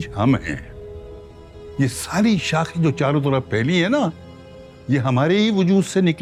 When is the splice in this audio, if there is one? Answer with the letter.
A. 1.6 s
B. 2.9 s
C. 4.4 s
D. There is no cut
D